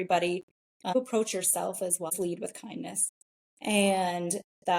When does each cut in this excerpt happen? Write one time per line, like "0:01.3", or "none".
0:00.9
0:02.1